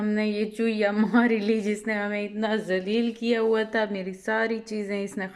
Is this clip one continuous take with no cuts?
yes; 0 cuts

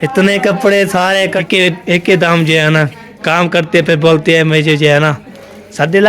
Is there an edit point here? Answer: yes; 1 cut; at 1.5 s

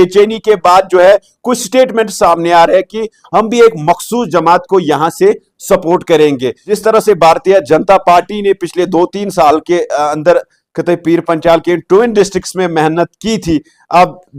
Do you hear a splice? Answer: no; 0 cuts

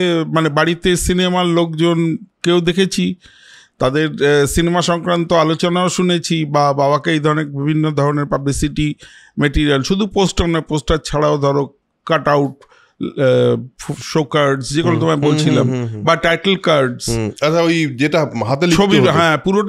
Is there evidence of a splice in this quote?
no; 0 cuts

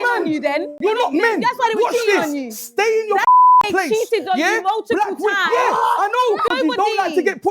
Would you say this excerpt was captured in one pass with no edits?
no; 1 cut; at 6.5 s

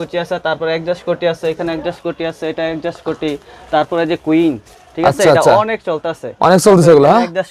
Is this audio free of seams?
yes; 0 cuts

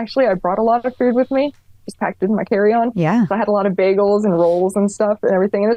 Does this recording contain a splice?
no; 0 cuts

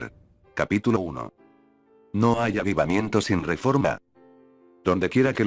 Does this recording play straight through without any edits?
yes; 0 cuts

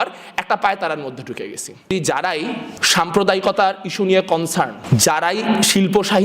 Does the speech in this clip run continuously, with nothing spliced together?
no; 3 cuts; at 1.9 s, 2.7 s, 4.8 s

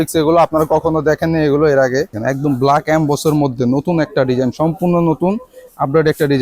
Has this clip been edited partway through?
yes; 1 cut; at 2.1 s

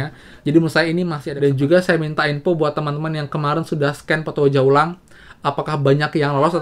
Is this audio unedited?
no; 1 cut; at 1.2 s

